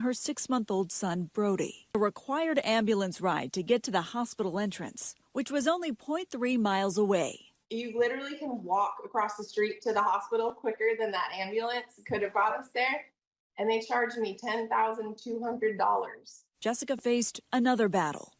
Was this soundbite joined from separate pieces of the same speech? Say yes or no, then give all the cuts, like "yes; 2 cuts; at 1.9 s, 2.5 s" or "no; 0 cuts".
yes; 1 cut; at 1.9 s